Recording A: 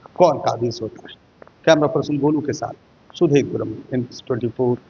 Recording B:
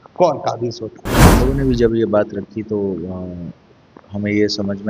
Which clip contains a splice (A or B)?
B